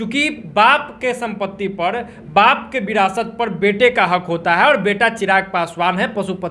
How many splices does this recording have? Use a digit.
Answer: 0